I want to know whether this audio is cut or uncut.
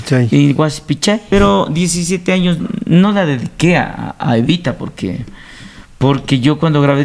cut